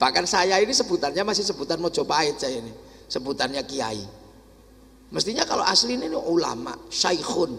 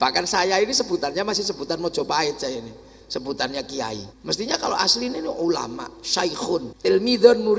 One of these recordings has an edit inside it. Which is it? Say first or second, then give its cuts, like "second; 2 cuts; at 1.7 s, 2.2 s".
second; 2 cuts; at 4.1 s, 6.7 s